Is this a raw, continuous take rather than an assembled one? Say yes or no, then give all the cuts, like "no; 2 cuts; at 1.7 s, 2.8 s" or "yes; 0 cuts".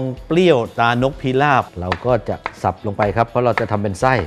no; 1 cut; at 1.8 s